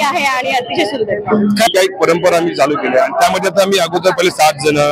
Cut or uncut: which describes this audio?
cut